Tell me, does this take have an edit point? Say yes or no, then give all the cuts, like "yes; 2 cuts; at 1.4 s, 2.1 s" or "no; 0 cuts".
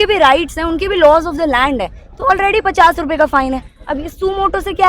no; 0 cuts